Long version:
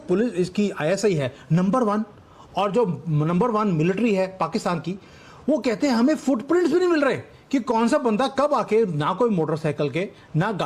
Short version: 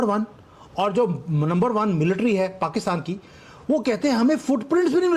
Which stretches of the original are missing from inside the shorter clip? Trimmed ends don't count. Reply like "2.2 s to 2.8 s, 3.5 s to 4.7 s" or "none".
none